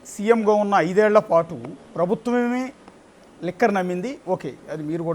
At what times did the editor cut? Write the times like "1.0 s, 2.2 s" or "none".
none